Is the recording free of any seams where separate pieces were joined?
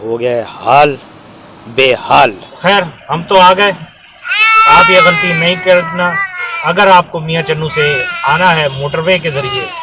no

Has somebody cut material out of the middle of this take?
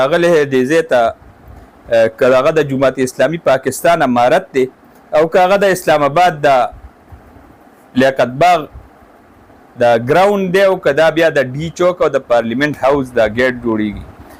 no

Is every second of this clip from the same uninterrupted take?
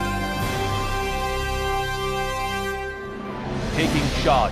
yes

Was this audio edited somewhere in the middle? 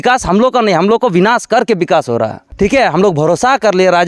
yes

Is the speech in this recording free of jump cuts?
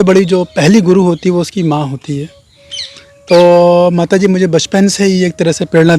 yes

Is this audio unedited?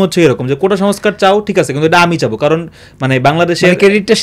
yes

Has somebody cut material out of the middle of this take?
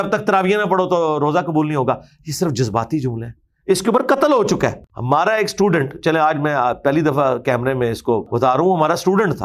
yes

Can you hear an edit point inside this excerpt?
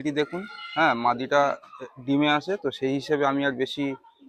no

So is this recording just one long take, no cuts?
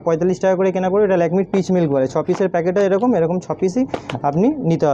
yes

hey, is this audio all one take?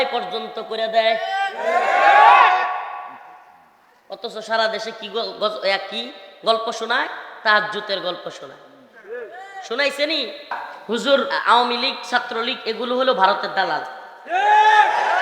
no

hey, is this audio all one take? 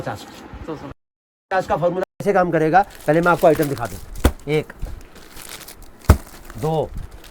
yes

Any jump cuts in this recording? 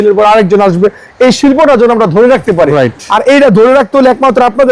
no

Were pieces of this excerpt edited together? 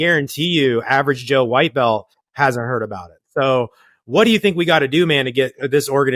no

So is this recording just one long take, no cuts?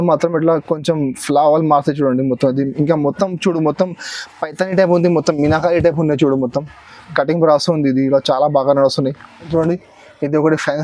no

